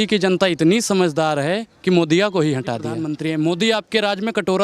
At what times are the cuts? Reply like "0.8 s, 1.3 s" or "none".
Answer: 3.1 s